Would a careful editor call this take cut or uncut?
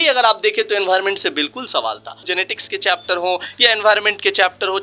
cut